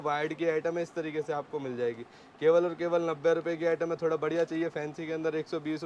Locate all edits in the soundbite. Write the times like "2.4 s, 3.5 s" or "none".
none